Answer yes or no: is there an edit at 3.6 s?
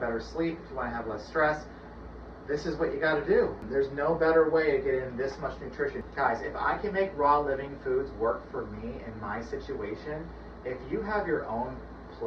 yes